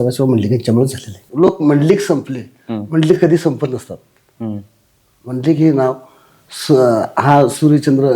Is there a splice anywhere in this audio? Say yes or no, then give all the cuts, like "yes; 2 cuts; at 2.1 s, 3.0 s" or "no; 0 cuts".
yes; 1 cut; at 1.1 s